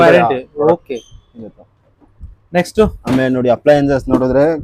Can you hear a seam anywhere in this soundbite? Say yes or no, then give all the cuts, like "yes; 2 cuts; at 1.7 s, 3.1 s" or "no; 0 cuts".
no; 0 cuts